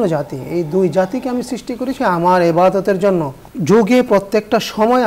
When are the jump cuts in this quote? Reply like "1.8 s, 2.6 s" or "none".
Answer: 1.9 s, 3.4 s